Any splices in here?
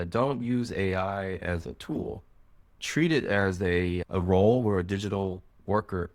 no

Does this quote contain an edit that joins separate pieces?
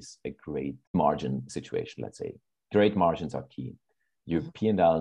yes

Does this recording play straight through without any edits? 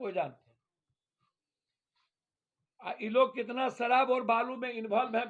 yes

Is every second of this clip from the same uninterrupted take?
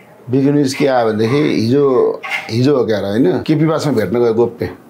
no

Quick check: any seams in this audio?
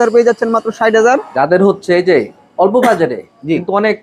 no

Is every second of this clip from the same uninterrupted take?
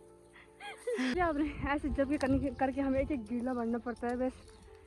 no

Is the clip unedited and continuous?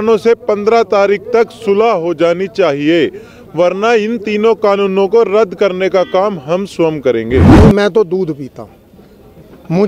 no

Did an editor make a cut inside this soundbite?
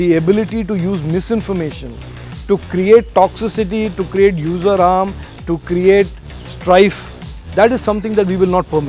no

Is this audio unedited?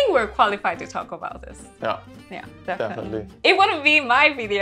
no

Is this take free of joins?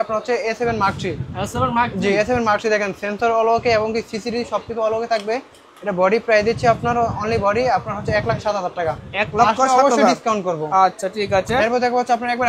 yes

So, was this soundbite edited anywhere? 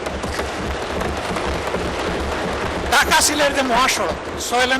no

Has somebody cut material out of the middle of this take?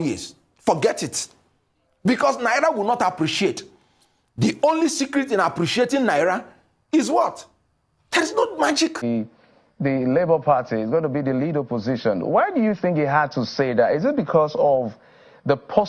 yes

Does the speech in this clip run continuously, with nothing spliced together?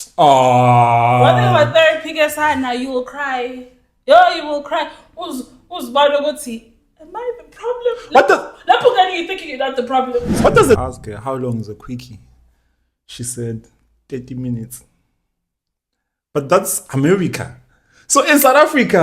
no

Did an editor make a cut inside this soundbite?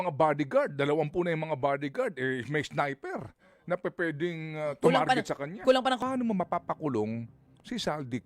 yes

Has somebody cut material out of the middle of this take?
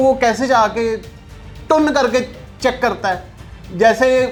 no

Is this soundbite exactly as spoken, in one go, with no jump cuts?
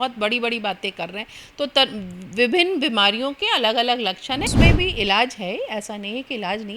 no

